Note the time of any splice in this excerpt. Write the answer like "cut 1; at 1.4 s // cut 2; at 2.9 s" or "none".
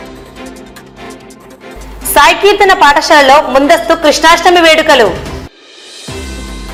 none